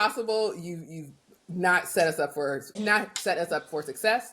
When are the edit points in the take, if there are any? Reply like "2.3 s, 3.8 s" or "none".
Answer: 2.8 s